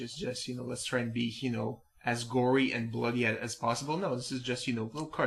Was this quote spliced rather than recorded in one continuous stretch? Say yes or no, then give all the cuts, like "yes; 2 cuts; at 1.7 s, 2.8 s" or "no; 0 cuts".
no; 0 cuts